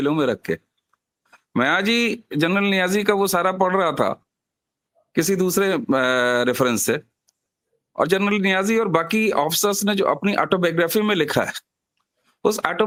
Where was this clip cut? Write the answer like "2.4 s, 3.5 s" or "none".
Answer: none